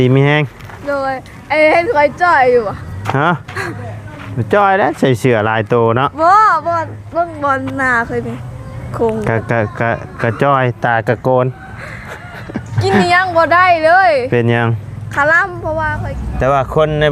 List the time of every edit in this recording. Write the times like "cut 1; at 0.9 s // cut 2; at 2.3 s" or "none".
cut 1; at 16.2 s

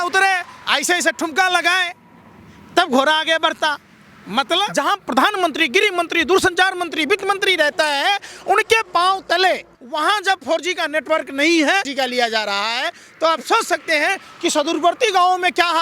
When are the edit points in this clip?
cut 1; at 4.7 s // cut 2; at 9.8 s // cut 3; at 11.9 s

